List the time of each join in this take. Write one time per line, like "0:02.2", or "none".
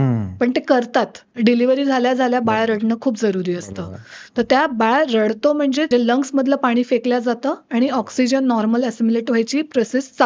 0:01.2
0:05.9